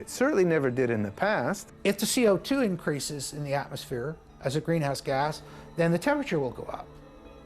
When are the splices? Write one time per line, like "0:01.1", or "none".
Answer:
0:01.7